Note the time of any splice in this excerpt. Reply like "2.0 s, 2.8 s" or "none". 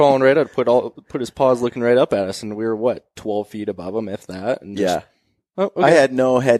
none